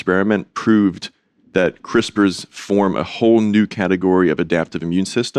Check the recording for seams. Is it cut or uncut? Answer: uncut